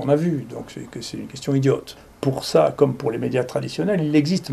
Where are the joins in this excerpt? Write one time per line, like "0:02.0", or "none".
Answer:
0:02.0